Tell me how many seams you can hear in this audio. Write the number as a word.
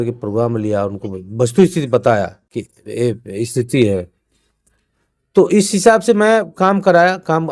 zero